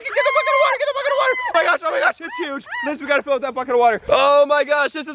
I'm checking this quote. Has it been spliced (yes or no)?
yes